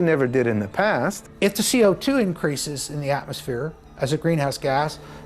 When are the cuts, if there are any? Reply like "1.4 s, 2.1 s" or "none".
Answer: 1.2 s

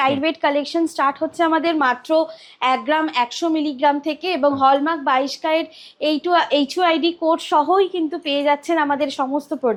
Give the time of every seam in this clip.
none

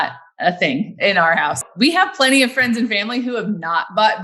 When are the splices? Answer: 1.6 s

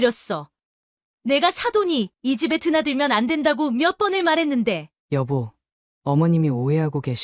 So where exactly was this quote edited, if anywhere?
4.9 s

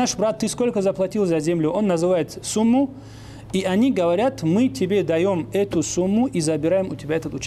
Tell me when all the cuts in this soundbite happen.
none

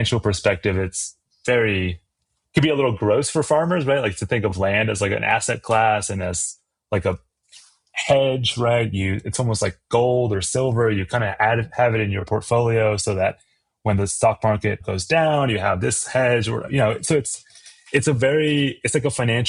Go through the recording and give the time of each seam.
none

